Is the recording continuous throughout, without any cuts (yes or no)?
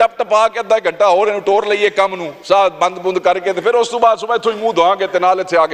yes